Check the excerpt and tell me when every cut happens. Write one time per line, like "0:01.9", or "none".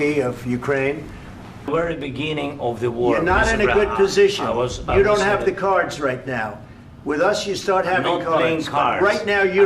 0:01.7